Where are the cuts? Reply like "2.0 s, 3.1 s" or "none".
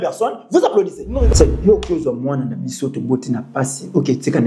1.3 s